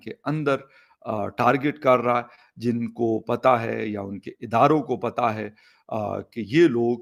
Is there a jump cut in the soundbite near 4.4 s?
no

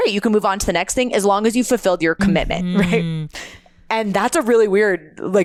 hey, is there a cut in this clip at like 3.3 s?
no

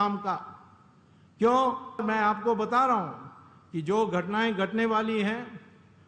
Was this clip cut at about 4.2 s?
no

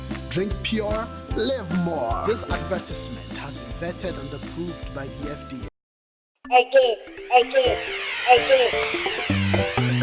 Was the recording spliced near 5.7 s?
yes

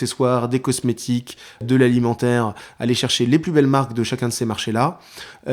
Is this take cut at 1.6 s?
yes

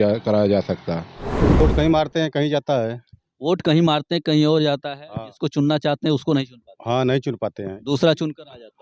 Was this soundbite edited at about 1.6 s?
yes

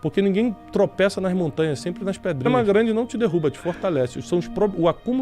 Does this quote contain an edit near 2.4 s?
yes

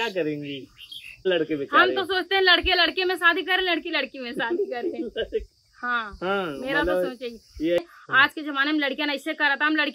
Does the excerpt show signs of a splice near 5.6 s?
no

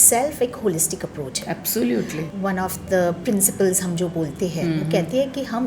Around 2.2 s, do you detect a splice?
yes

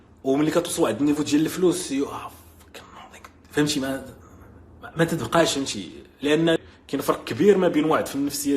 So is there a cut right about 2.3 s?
no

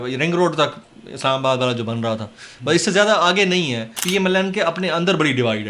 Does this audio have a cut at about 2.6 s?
no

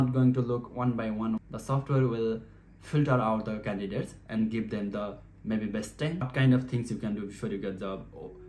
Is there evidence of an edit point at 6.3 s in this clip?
yes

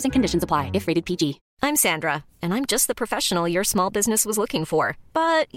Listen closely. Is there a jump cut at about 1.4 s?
yes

